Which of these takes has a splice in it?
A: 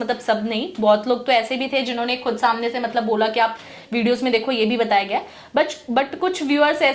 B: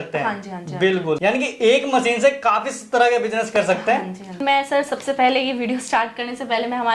B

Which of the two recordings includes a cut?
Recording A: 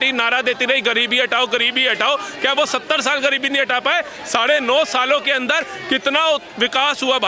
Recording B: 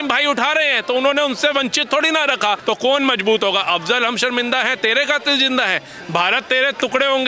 B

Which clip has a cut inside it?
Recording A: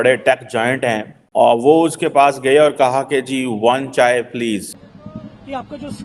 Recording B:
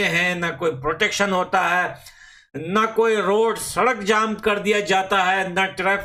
A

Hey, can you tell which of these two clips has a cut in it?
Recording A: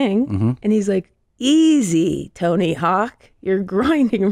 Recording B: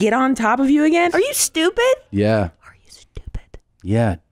B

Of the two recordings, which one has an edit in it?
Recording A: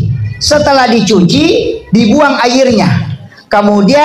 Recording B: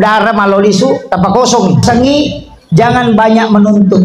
B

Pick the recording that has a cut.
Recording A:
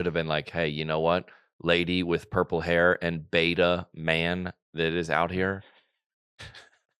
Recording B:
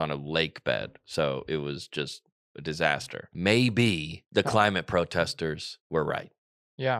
B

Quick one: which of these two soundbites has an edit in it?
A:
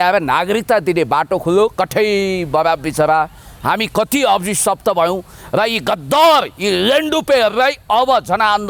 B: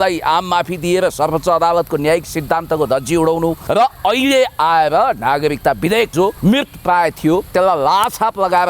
B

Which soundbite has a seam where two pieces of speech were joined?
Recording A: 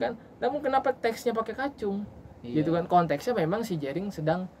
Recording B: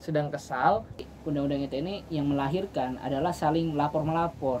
B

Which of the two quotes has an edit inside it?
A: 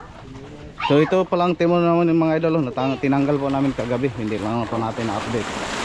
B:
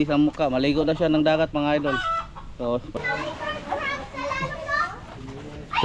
B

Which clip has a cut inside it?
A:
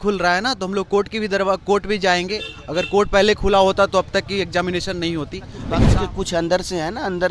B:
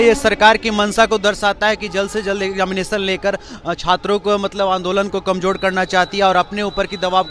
A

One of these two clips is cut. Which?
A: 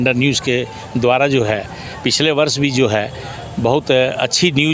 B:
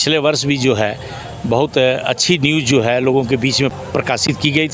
B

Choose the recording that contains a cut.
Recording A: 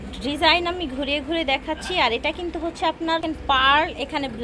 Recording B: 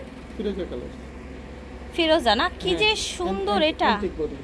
A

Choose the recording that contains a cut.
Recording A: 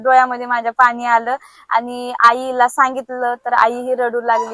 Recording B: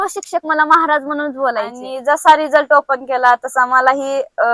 B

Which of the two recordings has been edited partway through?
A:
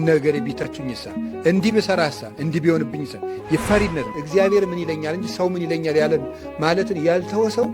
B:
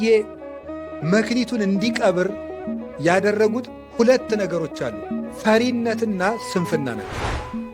A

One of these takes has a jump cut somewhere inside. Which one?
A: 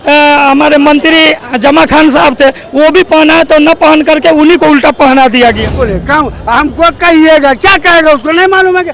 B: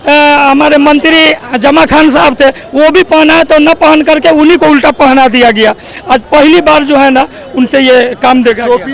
A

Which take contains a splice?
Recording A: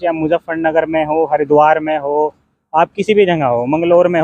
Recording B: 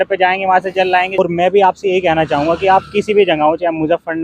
B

